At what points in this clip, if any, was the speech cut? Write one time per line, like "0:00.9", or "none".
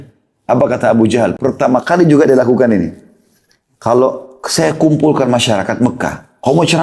none